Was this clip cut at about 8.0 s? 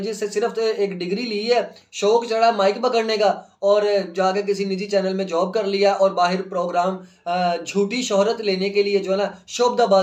no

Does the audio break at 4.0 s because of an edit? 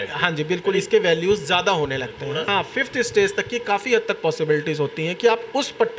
no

